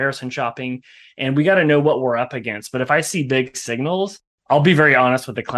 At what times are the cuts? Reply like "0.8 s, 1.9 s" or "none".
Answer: 4.3 s